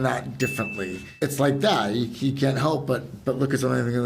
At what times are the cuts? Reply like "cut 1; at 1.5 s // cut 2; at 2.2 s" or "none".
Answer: cut 1; at 1.0 s